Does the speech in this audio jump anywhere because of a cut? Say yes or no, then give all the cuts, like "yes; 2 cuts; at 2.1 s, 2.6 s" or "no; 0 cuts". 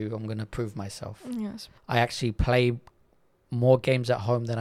yes; 1 cut; at 1.7 s